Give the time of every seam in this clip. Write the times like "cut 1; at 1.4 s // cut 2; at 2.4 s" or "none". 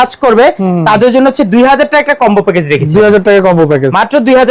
none